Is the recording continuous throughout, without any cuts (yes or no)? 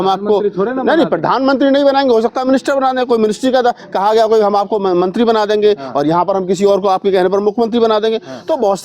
yes